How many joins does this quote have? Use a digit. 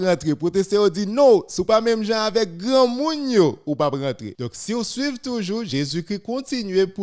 0